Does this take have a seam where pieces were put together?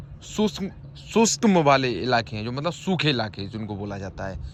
no; 0 cuts

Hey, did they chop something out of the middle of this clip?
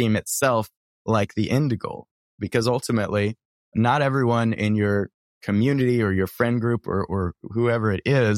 yes; 2 cuts; at 2.4 s, 3.7 s

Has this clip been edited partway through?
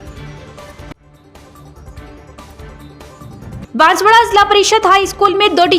yes; 1 cut; at 0.9 s

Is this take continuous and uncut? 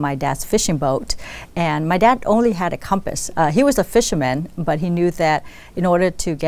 yes; 0 cuts

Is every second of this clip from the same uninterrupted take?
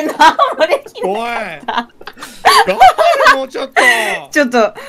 yes; 0 cuts

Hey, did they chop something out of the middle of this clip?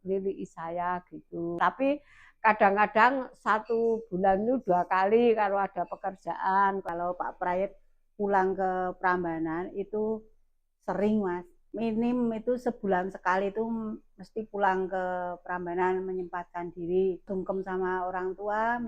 yes; 4 cuts; at 1.6 s, 6.8 s, 11.6 s, 17.3 s

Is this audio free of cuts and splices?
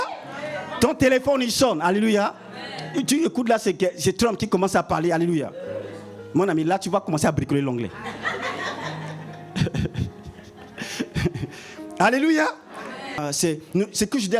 no; 1 cut; at 13.2 s

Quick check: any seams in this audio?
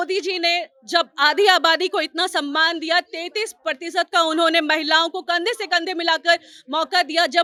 no; 0 cuts

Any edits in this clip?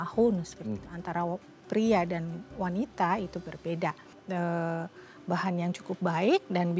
yes; 1 cut; at 4.1 s

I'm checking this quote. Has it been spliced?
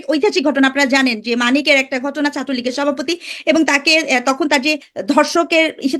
yes; 1 cut; at 4.9 s

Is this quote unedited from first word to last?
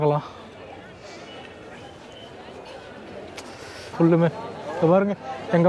no; 1 cut; at 3.9 s

